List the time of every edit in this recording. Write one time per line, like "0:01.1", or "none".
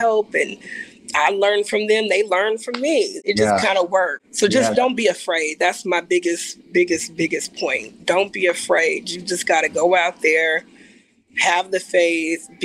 0:03.2